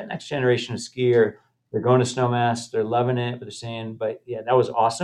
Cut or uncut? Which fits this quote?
uncut